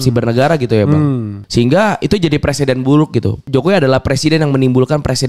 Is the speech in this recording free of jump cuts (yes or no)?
no